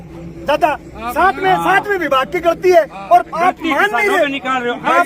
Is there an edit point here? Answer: no; 0 cuts

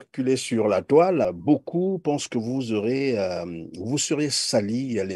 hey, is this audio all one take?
no; 1 cut; at 1.4 s

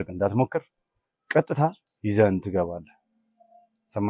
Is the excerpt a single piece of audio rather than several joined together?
yes; 0 cuts

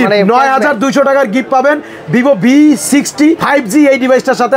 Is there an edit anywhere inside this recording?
no; 0 cuts

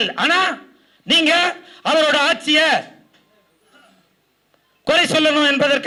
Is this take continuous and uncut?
yes; 0 cuts

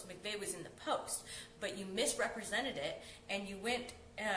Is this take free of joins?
no; 1 cut; at 2.4 s

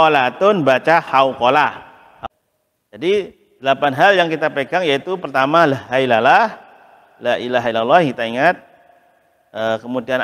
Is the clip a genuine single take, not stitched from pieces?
no; 1 cut; at 2.2 s

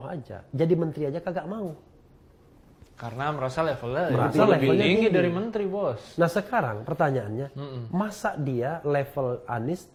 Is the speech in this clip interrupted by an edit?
no; 0 cuts

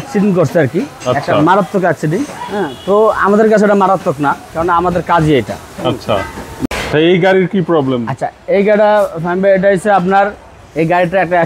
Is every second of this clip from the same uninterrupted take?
no; 1 cut; at 6.5 s

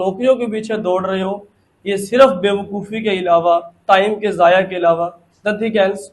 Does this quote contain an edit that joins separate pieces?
no; 0 cuts

